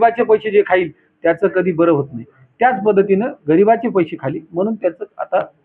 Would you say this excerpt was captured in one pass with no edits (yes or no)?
yes